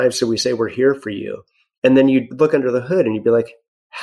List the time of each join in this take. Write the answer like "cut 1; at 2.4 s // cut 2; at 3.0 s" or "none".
cut 1; at 2.3 s